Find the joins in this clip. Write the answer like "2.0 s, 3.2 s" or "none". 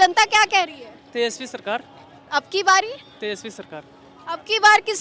none